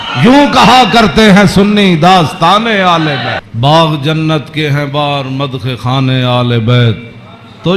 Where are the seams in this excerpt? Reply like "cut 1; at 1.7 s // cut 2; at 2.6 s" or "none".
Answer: cut 1; at 3.5 s

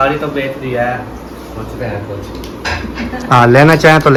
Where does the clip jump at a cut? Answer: none

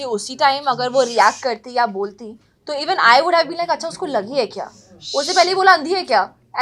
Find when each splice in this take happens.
none

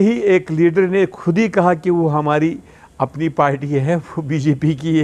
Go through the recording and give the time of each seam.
none

